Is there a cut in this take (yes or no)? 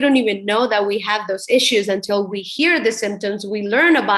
no